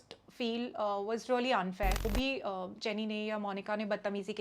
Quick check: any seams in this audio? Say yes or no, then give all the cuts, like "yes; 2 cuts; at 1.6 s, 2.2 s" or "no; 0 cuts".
yes; 1 cut; at 2.0 s